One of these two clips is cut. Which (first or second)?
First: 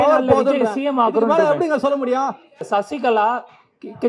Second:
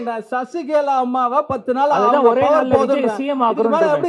first